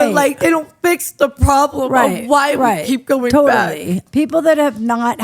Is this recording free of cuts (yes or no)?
no